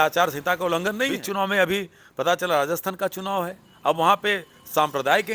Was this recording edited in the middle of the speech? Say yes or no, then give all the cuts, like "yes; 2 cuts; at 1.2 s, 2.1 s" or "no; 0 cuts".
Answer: yes; 1 cut; at 1.2 s